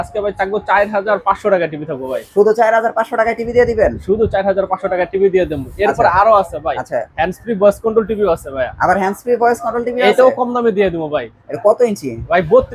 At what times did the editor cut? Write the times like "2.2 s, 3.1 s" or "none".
none